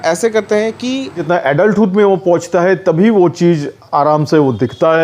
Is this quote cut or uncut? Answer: cut